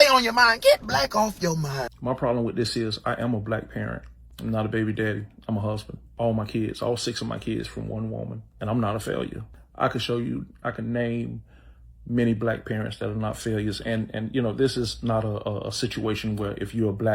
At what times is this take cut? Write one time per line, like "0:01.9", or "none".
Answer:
0:01.8